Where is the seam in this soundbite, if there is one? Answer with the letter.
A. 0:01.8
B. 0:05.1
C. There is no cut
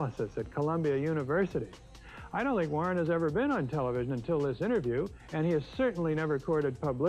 A